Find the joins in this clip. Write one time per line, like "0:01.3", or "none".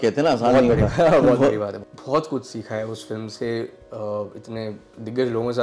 0:01.8